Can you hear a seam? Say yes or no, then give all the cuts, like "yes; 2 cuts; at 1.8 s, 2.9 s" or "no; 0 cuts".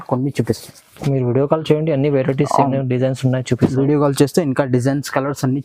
no; 0 cuts